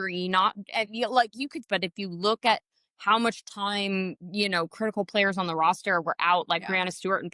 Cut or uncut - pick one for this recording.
cut